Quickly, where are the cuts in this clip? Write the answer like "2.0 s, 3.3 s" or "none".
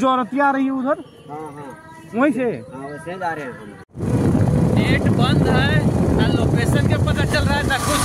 3.9 s